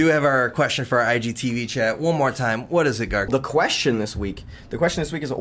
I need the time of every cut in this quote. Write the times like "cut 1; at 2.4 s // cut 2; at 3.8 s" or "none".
cut 1; at 3.3 s